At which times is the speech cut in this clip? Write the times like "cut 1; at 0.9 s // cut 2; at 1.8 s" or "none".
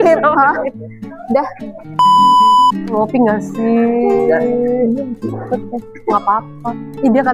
cut 1; at 1.9 s // cut 2; at 2.9 s